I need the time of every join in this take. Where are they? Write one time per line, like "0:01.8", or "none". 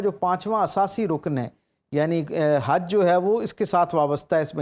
none